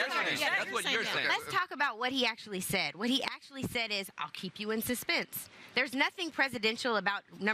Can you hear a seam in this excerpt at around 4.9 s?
no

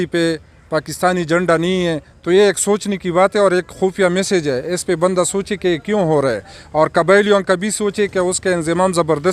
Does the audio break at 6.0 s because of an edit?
no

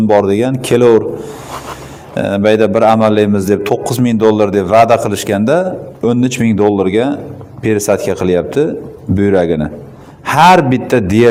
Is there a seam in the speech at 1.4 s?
no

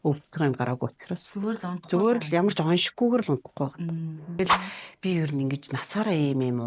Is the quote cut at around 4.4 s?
yes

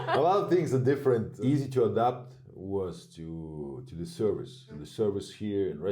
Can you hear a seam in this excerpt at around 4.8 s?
yes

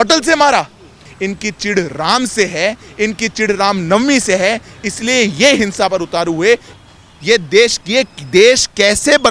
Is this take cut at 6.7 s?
yes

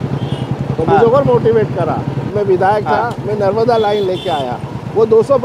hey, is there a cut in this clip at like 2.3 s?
yes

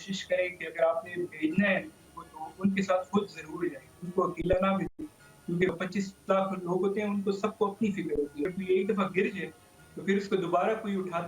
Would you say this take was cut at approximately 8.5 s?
yes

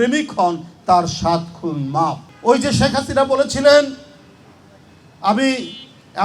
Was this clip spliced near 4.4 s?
no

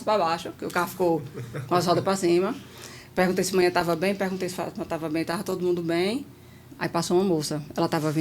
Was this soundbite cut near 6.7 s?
yes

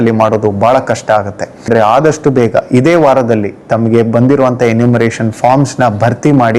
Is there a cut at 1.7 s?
yes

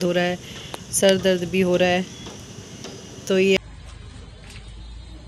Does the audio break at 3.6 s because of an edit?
yes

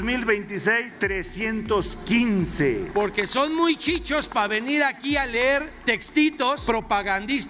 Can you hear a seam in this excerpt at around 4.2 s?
no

